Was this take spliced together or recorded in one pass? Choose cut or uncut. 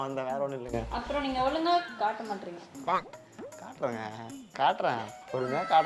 uncut